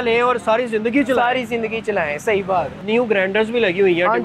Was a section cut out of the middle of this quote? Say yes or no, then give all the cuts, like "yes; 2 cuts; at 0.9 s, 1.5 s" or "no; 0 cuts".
yes; 1 cut; at 2.8 s